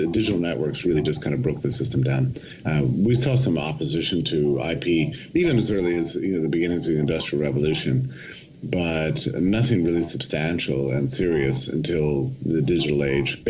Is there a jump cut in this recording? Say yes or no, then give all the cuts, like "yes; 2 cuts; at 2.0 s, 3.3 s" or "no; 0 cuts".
no; 0 cuts